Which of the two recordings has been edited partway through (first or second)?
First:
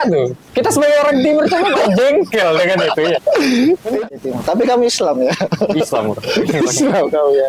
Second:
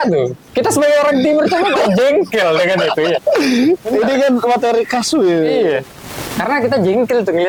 first